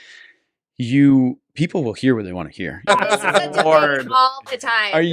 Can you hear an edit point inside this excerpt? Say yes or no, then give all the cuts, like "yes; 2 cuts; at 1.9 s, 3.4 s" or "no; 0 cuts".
yes; 1 cut; at 2.8 s